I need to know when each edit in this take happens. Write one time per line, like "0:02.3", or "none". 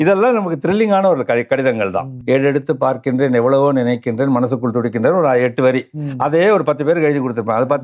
0:02.1

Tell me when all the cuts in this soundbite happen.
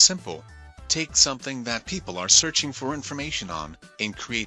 none

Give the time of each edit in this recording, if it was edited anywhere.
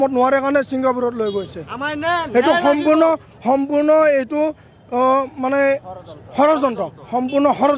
none

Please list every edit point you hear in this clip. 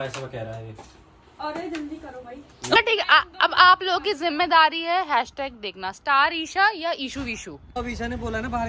0:02.8
0:07.8

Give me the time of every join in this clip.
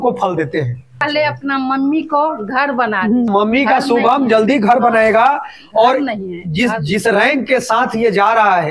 0:01.1
0:03.3

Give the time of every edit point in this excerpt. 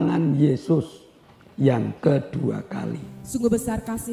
0:03.1

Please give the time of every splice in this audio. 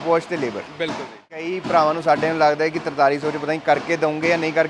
0:01.5

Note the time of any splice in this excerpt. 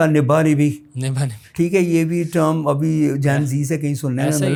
none

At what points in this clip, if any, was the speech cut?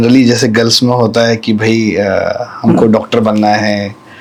none

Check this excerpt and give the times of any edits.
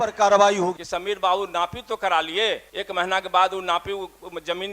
0:00.8
0:02.7

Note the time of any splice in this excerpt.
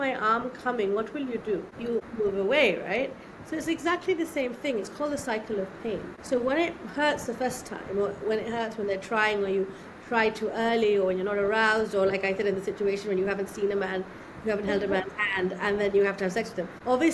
none

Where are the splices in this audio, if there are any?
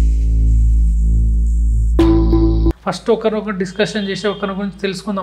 0:02.8

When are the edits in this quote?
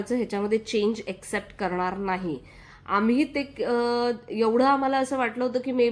none

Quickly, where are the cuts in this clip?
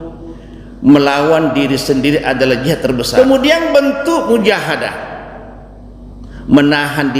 0:03.1

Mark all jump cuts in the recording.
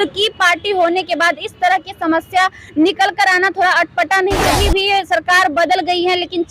0:04.5

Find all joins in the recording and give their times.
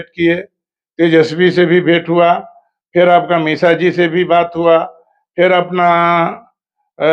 none

